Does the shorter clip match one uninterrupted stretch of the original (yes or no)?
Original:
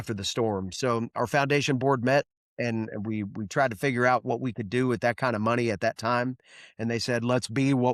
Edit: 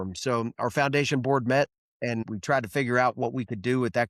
no